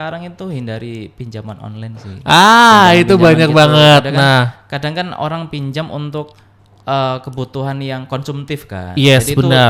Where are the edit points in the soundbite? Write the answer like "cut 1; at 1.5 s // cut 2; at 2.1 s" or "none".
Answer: none